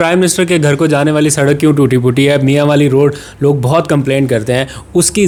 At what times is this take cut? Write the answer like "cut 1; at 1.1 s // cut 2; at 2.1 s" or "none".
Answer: none